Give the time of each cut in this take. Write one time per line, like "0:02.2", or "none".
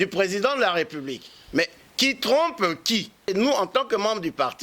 0:03.3